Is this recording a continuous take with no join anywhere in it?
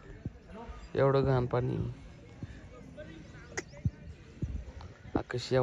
yes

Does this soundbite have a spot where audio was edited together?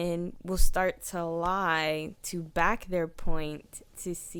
no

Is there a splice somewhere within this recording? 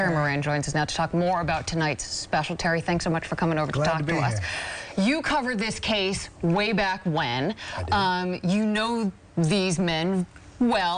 yes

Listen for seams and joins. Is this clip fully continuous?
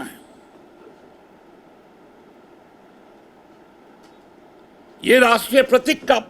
yes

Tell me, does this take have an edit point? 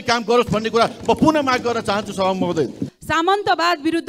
yes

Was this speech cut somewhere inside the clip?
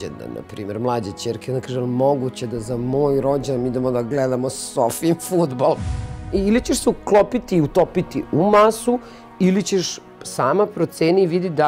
yes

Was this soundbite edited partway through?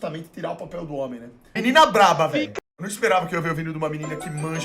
yes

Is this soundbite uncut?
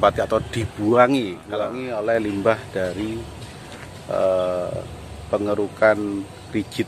no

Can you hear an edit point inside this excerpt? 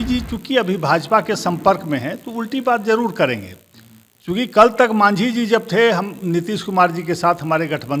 no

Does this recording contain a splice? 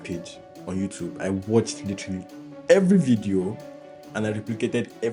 no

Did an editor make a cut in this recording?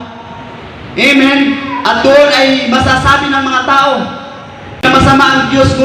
yes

